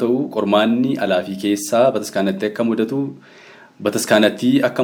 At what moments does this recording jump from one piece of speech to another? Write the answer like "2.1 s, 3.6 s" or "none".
none